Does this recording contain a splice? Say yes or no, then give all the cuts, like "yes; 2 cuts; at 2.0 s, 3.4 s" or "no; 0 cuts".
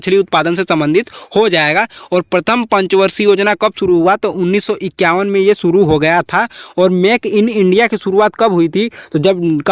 no; 0 cuts